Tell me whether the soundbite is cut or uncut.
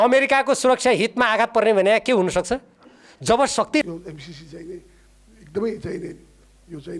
cut